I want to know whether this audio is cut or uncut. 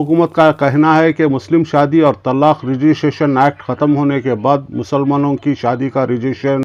uncut